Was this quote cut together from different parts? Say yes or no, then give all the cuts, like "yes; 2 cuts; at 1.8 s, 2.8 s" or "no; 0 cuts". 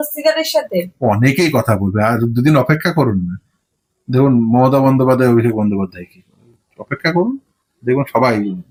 no; 0 cuts